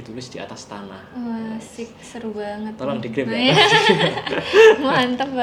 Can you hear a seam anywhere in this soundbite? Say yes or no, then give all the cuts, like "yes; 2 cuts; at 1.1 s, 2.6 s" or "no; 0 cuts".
no; 0 cuts